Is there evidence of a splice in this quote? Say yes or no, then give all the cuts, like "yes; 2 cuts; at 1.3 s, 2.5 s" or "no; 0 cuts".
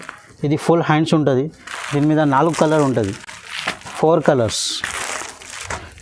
no; 0 cuts